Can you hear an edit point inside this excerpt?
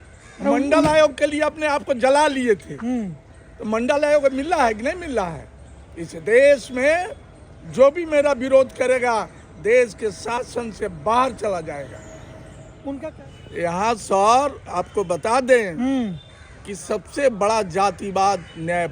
yes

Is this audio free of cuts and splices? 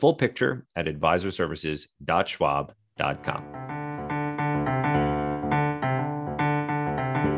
no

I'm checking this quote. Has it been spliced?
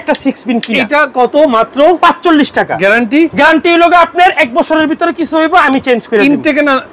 no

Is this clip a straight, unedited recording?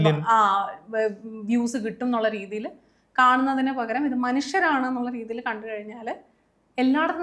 yes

